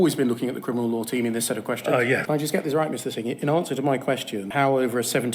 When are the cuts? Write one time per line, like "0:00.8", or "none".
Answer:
0:02.2
0:04.4